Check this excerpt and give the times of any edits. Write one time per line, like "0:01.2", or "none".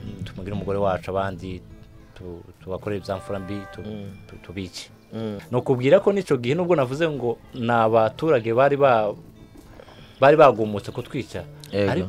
0:05.4